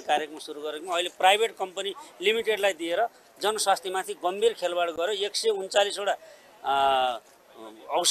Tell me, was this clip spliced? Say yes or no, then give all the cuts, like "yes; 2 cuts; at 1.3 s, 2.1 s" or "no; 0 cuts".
no; 0 cuts